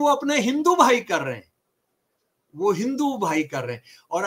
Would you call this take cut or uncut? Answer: uncut